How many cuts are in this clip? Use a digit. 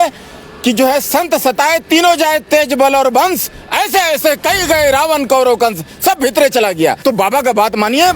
1